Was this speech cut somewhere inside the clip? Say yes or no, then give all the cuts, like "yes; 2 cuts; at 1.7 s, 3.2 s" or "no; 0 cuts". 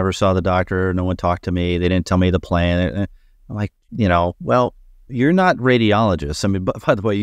no; 0 cuts